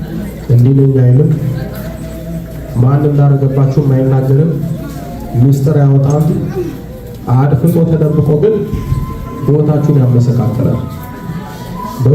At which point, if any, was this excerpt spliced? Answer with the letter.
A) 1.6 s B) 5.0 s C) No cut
C